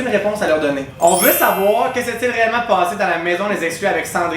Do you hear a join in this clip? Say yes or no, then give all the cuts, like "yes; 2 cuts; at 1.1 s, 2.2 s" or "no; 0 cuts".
yes; 1 cut; at 1.0 s